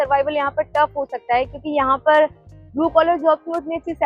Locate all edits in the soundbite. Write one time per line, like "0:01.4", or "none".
none